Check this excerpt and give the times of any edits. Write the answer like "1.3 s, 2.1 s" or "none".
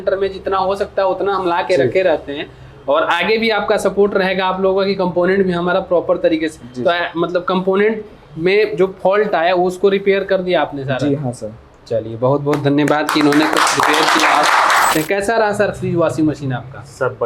14.9 s